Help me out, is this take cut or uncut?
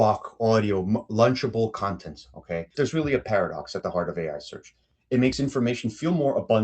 cut